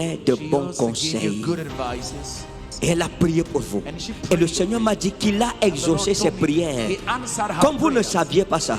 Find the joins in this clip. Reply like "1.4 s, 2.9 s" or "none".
2.5 s